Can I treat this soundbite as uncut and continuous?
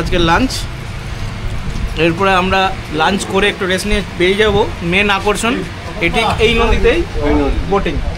yes; 0 cuts

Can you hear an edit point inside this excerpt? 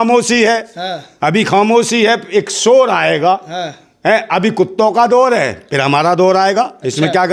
no; 0 cuts

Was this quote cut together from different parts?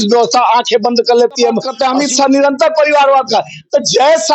yes; 1 cut; at 1.7 s

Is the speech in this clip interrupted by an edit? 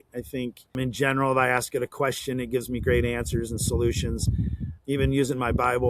yes; 2 cuts; at 0.7 s, 4.7 s

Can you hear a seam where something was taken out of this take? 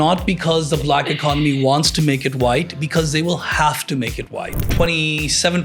yes; 1 cut; at 4.5 s

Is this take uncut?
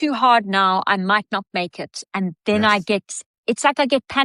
yes; 0 cuts

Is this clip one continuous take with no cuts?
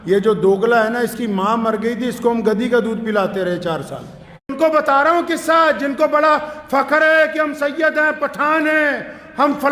no; 1 cut; at 4.5 s

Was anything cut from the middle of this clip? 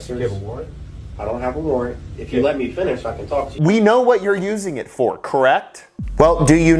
no; 0 cuts

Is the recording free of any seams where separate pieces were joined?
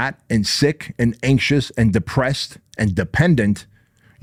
yes; 0 cuts

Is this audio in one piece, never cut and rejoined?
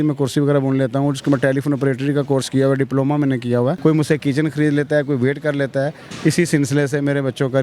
no; 1 cut; at 3.8 s

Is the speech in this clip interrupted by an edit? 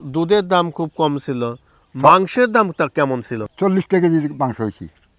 yes; 1 cut; at 3.3 s

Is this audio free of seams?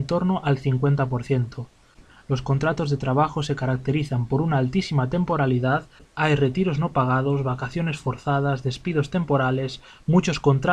yes; 0 cuts

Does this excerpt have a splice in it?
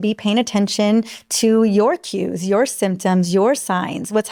no; 0 cuts

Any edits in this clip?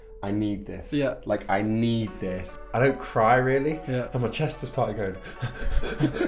yes; 1 cut; at 2.5 s

